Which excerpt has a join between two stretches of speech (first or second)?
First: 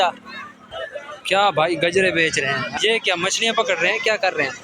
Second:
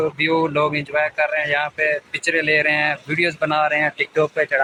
first